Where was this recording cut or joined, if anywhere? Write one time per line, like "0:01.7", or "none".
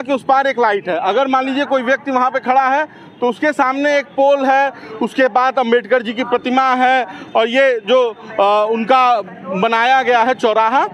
none